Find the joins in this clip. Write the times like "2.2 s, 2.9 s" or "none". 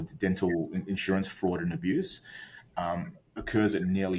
none